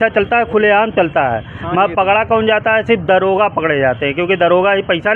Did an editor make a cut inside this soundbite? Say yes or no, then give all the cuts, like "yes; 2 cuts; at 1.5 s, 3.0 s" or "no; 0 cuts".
no; 0 cuts